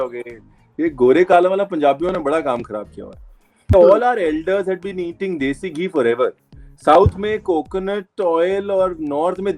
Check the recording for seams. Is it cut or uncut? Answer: cut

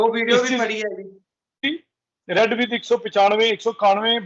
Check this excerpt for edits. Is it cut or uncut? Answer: cut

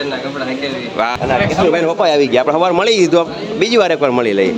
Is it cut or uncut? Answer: cut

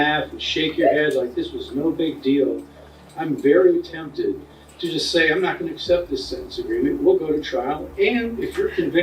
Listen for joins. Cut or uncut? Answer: cut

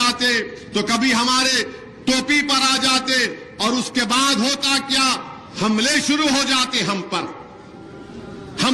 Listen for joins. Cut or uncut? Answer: uncut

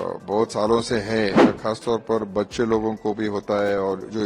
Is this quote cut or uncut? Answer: cut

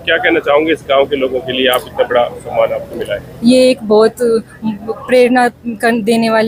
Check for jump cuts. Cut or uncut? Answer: uncut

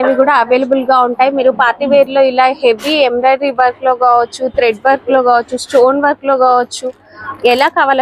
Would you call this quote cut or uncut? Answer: uncut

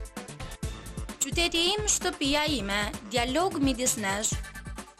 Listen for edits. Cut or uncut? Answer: cut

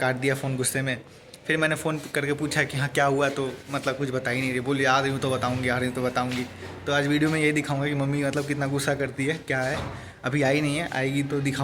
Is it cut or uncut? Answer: uncut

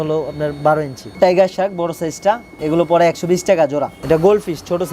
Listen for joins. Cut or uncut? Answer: cut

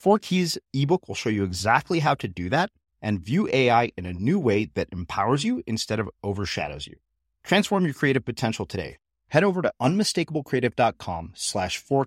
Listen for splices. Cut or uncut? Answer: uncut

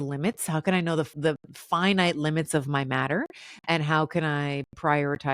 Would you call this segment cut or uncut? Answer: cut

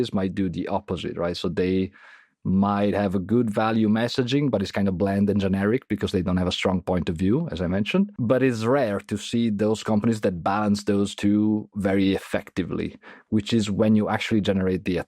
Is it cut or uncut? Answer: cut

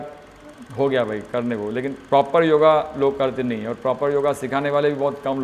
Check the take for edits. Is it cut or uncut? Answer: uncut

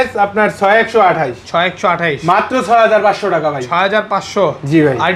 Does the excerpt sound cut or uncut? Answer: uncut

